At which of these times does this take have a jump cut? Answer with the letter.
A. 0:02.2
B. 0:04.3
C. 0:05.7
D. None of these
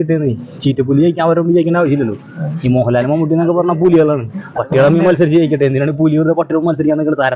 D